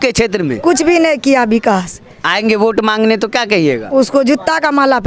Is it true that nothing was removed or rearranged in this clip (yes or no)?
yes